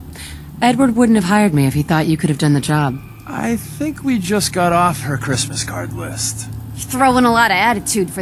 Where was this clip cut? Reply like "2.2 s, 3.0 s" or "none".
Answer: none